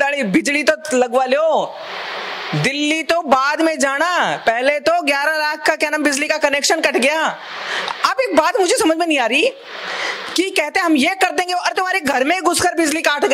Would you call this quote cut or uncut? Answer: uncut